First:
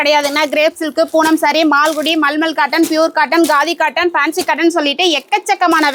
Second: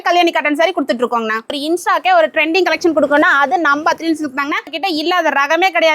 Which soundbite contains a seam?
second; 2 cuts; at 1.6 s, 4.8 s

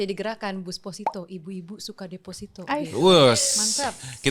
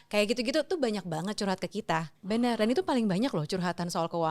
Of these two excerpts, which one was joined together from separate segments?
second; 1 cut; at 2.3 s

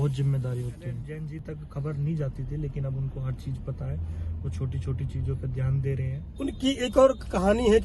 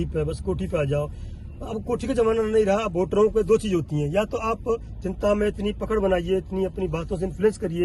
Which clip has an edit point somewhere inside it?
first; 2 cuts; at 1.1 s, 6.2 s

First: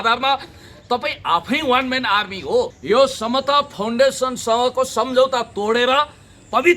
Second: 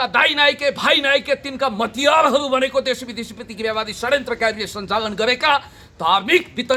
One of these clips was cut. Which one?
first; 1 cut; at 2.7 s

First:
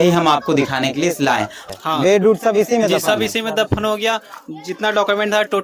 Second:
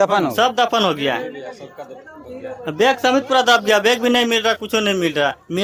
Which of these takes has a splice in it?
first; 1 cut; at 1.7 s

